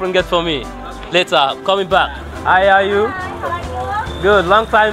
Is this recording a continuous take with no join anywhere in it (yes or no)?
no